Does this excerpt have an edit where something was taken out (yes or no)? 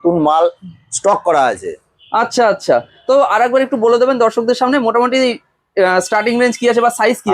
no